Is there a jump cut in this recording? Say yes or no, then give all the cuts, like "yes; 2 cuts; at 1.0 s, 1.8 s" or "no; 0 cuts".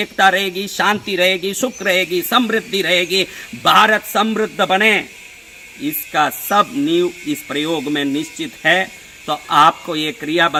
no; 0 cuts